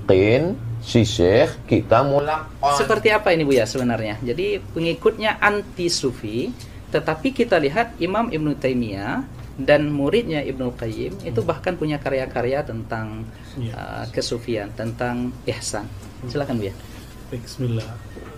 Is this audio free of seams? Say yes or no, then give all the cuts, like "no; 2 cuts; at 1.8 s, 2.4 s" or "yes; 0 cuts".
no; 1 cut; at 2.2 s